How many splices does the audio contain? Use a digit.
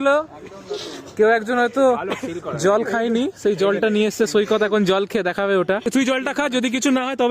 1